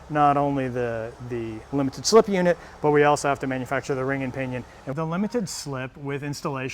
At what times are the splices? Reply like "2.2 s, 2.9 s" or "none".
4.9 s